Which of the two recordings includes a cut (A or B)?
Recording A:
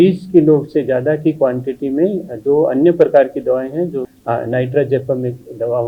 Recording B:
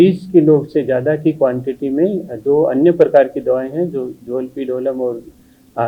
A